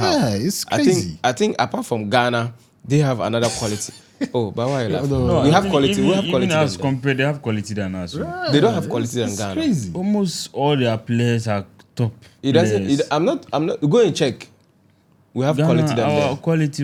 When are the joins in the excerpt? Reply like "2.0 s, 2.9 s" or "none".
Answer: none